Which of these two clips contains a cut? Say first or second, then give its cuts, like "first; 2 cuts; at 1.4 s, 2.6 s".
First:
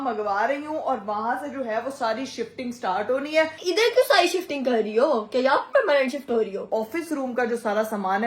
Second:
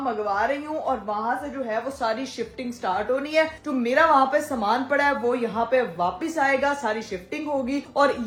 first; 2 cuts; at 3.6 s, 6.7 s